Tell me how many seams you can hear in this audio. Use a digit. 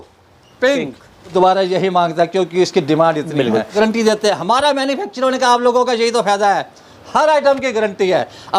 2